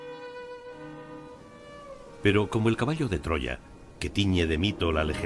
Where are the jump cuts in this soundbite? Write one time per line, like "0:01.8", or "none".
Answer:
none